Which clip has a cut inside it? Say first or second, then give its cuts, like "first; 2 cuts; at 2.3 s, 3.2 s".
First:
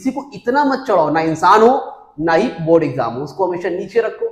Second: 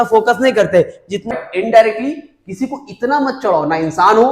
second; 1 cut; at 1.3 s